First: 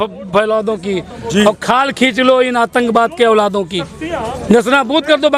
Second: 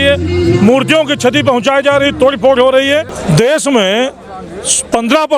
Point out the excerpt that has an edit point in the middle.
second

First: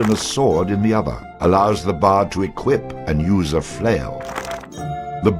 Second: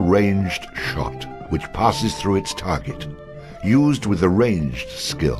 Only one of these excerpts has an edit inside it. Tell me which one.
first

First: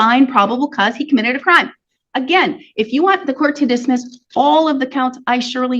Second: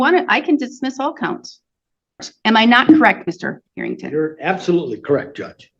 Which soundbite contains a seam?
second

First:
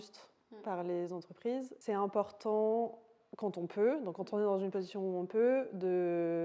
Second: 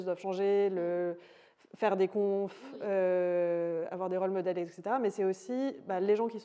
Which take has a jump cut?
first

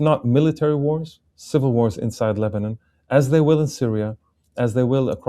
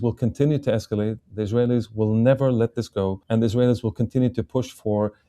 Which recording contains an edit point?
second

